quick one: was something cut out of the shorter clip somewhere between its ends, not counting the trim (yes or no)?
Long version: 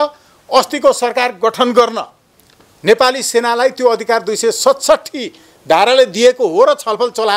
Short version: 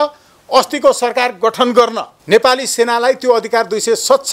yes